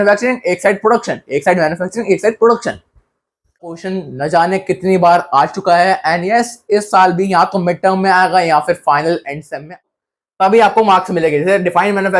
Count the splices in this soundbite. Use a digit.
2